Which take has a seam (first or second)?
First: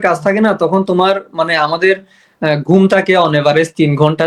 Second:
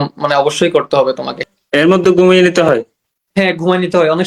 second